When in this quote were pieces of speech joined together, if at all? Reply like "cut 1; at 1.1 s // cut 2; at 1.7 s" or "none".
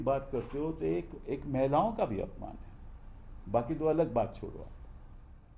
none